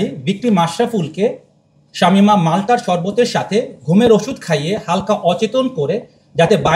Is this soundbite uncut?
yes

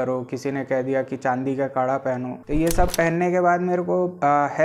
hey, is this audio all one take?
no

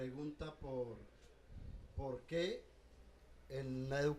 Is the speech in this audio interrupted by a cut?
yes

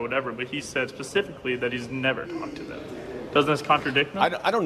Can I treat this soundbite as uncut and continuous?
yes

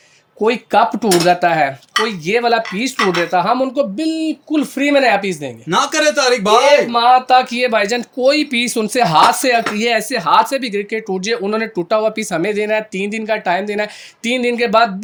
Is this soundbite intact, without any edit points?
yes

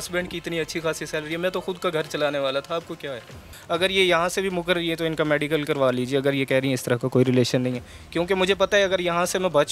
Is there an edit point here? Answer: yes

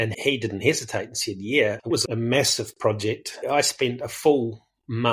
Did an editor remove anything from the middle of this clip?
yes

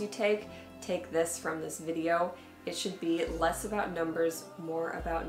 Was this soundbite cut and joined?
no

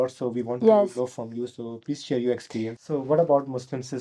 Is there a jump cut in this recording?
yes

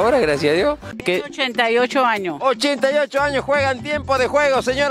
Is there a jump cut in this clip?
yes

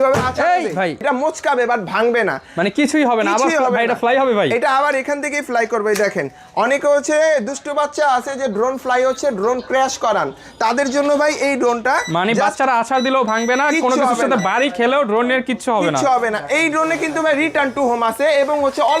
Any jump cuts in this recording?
yes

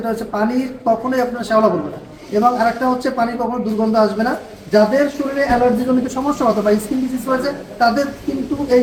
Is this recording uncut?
yes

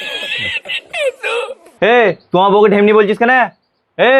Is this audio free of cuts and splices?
yes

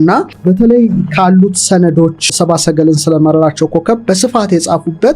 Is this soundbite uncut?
no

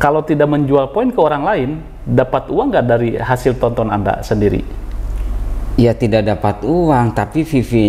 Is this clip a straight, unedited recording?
yes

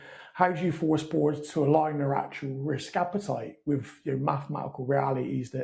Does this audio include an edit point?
no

